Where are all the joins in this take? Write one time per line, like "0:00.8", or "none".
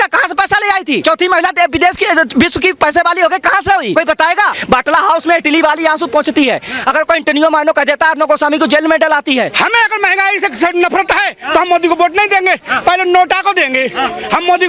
0:01.0
0:04.3
0:09.5